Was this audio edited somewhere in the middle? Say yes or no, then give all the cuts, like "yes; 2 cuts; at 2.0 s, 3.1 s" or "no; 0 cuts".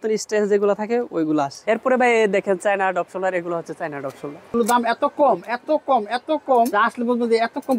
yes; 3 cuts; at 1.6 s, 4.5 s, 6.7 s